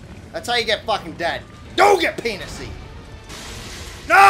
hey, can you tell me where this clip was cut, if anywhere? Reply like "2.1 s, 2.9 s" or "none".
1.5 s